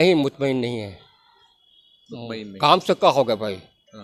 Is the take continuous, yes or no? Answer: yes